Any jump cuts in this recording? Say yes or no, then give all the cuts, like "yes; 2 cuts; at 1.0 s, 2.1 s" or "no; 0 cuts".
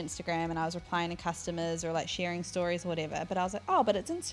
no; 0 cuts